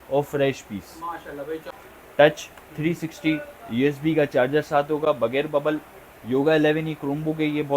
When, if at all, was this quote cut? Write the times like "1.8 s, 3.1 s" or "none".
1.6 s